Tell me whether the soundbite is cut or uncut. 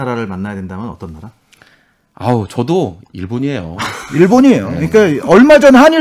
uncut